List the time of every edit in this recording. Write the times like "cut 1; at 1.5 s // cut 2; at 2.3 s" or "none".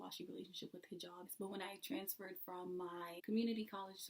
cut 1; at 1.2 s